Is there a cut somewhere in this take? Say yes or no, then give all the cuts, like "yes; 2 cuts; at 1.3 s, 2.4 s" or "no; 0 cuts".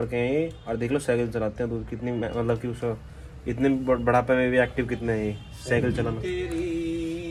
no; 0 cuts